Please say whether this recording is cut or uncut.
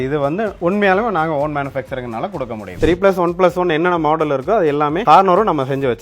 cut